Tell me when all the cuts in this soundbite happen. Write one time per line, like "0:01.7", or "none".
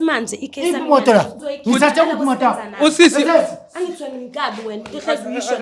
0:01.4